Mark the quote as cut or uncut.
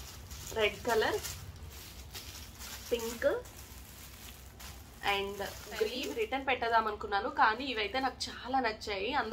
cut